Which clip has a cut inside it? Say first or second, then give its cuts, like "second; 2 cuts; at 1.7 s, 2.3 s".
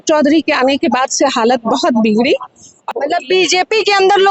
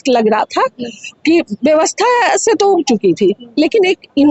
first; 1 cut; at 2.9 s